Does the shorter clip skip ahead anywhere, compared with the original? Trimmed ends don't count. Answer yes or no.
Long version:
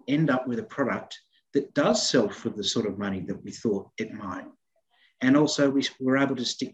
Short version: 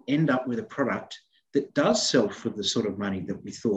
no